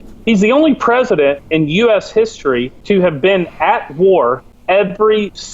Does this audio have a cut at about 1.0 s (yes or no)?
no